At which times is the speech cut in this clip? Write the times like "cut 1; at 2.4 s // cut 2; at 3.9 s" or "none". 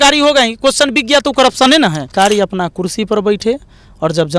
cut 1; at 2.1 s